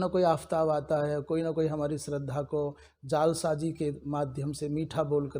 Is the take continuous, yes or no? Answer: yes